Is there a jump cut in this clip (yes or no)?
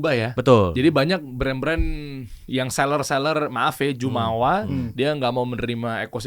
no